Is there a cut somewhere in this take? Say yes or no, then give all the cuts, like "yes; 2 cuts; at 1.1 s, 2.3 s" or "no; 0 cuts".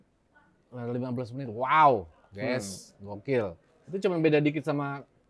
no; 0 cuts